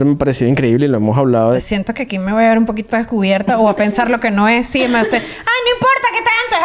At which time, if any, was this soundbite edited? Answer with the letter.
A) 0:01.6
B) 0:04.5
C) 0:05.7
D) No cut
A